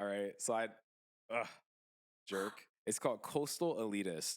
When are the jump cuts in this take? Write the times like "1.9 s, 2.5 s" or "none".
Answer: 2.7 s